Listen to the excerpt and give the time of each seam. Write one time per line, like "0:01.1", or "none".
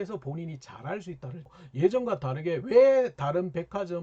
0:01.6